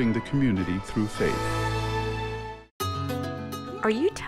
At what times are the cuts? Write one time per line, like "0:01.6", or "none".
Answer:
0:01.4
0:02.7